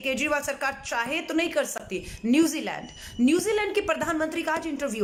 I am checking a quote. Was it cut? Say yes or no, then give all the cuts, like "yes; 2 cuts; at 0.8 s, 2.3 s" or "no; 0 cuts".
no; 0 cuts